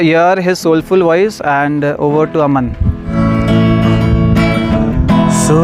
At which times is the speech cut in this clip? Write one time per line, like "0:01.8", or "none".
0:03.1